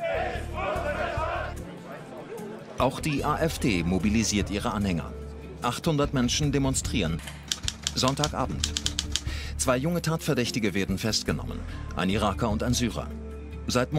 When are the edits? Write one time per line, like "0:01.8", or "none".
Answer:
none